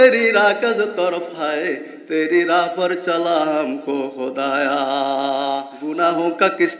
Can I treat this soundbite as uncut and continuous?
no; 1 cut; at 5.8 s

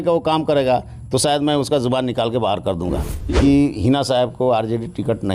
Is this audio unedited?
no; 1 cut; at 3.1 s

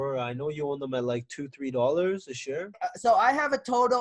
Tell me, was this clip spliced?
yes; 1 cut; at 2.7 s

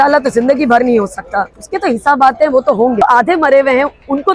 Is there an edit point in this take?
yes; 1 cut; at 3.0 s

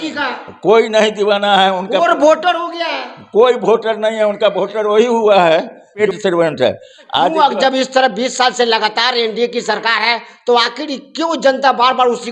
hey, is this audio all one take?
no; 2 cuts; at 6.0 s, 7.3 s

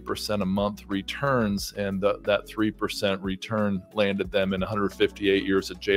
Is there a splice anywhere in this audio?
no; 0 cuts

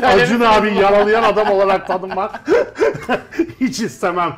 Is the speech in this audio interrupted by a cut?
no; 0 cuts

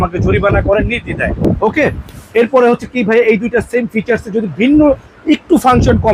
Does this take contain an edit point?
no; 0 cuts

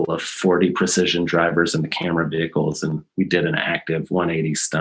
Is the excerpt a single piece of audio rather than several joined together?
no; 1 cut; at 3.0 s

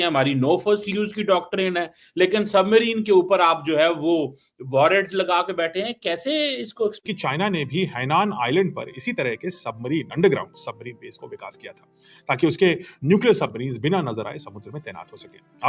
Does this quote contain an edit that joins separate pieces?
yes; 1 cut; at 7.0 s

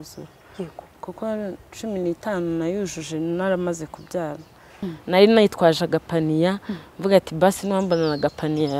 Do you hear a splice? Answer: yes; 1 cut; at 4.7 s

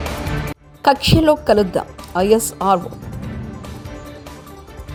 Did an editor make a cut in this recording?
no; 0 cuts

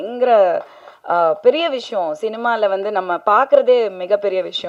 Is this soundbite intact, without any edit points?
yes; 0 cuts

